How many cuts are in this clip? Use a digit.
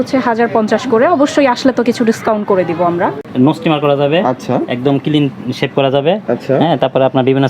1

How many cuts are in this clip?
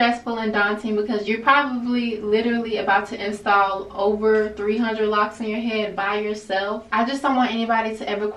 1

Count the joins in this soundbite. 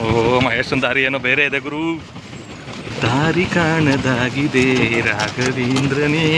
1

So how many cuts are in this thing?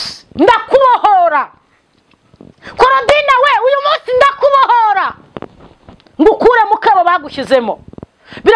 0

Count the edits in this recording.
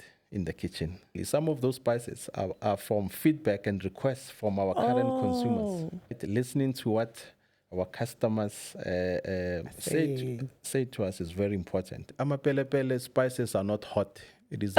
3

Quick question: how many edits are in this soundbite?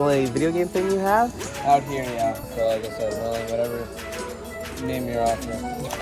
1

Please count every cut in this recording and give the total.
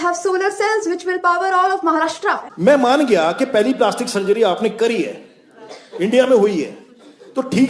1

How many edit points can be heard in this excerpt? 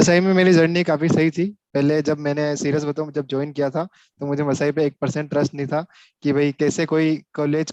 0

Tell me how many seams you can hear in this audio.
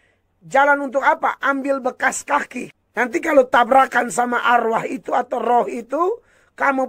1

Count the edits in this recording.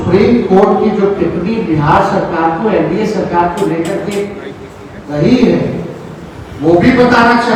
0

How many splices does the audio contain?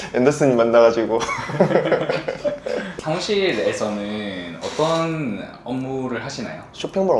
1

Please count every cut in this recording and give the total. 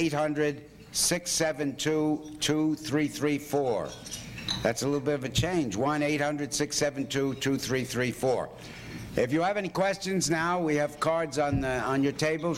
0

